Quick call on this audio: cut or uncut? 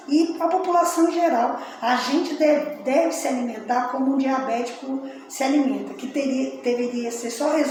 uncut